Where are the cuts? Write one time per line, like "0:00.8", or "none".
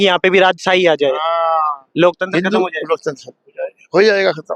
none